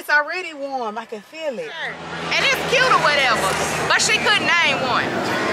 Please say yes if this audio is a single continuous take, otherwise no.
no